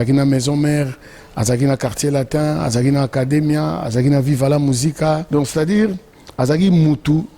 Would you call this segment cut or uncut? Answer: cut